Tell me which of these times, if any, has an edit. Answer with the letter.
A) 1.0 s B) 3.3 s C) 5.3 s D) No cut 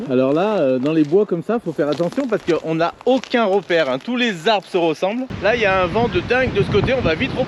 C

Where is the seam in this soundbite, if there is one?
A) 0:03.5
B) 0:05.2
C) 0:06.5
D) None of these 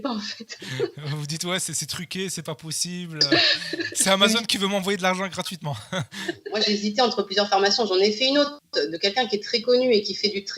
C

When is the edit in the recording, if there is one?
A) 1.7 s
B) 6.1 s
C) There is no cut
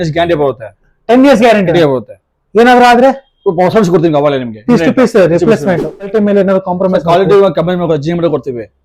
B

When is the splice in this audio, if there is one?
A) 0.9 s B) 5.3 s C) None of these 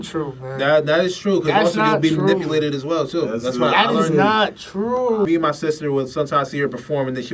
B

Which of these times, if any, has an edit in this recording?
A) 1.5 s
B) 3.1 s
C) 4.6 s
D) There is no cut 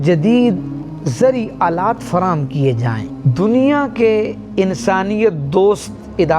B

